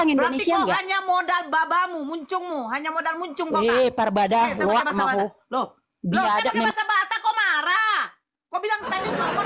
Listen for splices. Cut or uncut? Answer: uncut